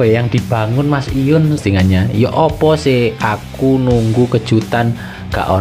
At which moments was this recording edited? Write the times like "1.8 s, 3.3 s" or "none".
1.6 s